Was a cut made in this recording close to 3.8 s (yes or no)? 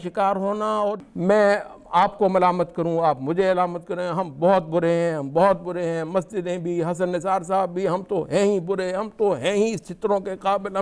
no